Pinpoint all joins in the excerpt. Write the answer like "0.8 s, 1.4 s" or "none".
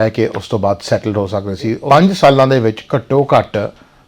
1.8 s